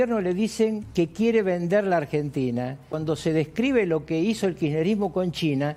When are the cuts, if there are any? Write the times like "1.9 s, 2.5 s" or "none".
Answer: 0.8 s, 2.9 s

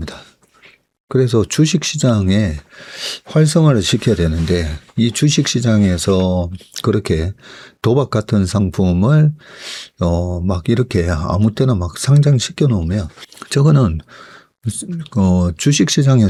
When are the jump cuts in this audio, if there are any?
none

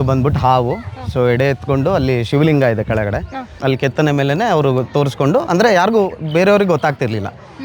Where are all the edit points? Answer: 3.5 s

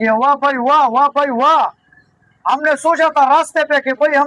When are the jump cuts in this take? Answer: none

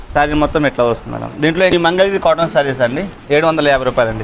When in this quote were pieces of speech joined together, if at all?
1.7 s

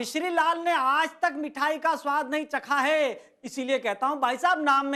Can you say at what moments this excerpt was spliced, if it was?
none

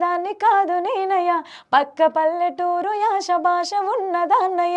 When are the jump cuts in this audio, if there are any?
none

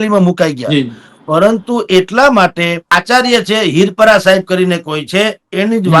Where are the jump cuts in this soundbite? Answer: 2.9 s

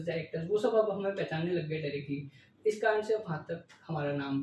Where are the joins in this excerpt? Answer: none

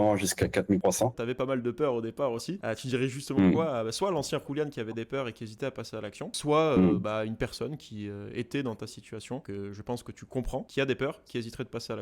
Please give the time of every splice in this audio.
0.9 s, 6.4 s, 9.4 s, 10.7 s

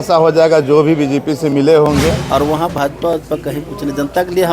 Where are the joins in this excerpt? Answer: 2.2 s

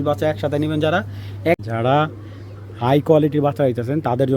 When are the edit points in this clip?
1.6 s

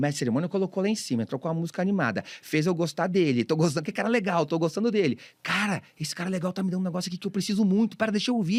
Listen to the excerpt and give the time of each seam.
none

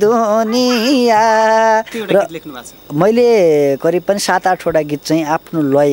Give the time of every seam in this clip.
1.9 s

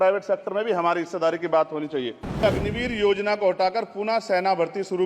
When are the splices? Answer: 2.4 s

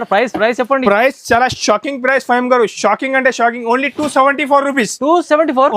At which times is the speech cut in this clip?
none

